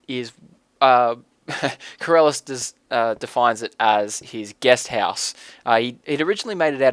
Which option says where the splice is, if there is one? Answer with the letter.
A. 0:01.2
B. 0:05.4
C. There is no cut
B